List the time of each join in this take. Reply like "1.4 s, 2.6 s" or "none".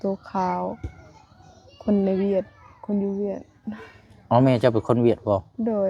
none